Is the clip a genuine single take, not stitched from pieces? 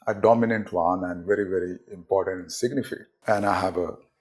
no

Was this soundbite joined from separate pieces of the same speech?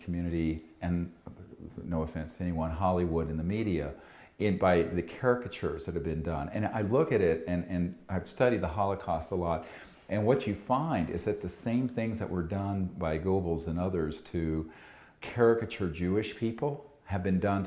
yes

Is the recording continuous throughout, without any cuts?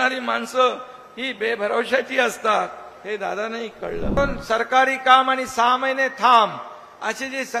no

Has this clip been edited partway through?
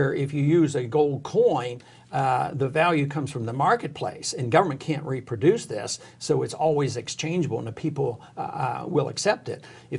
no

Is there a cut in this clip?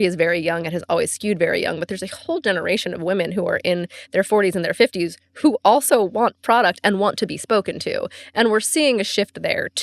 no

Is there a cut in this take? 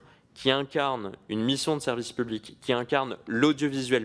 no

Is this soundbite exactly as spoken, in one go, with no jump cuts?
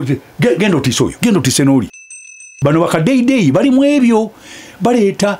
no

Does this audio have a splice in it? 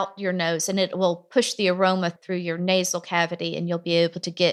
no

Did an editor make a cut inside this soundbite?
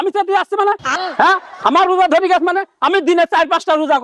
yes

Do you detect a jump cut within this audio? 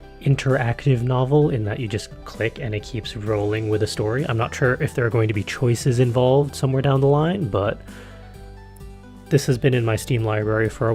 yes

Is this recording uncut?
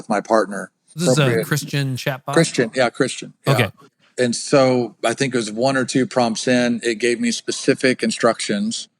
no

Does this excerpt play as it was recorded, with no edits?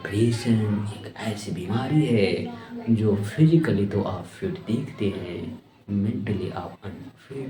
yes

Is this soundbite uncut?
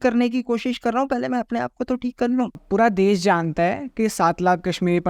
no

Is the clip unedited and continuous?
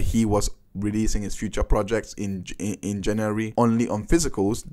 no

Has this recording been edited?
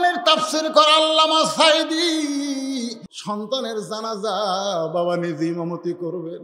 yes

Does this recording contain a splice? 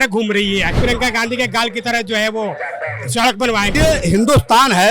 yes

